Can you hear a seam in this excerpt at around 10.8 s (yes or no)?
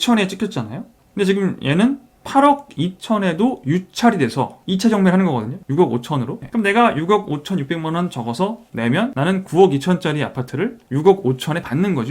no